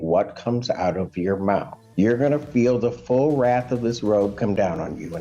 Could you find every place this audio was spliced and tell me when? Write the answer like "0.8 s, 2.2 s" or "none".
1.8 s

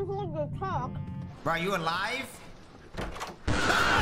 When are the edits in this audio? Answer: 1.3 s

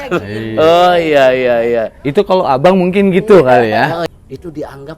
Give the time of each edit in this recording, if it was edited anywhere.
4.1 s

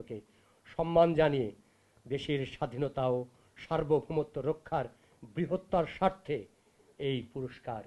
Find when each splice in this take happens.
none

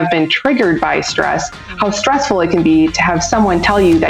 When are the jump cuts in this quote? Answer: none

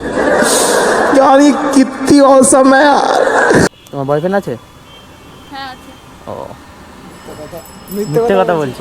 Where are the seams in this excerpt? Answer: 3.8 s

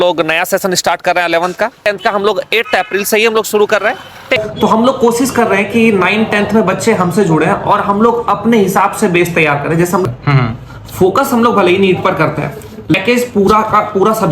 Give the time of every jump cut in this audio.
1.9 s, 4.4 s, 10.0 s, 12.9 s

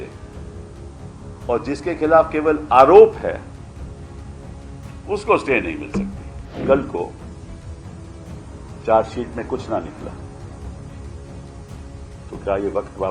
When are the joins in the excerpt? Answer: 6.5 s, 7.1 s, 8.8 s, 10.1 s, 12.3 s

